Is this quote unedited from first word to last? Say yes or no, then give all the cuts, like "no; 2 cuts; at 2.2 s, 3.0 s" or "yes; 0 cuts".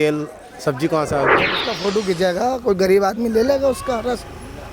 no; 1 cut; at 1.7 s